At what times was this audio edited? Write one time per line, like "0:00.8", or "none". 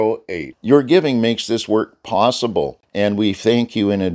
0:02.8